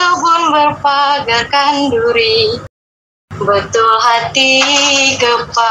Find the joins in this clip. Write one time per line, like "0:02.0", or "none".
none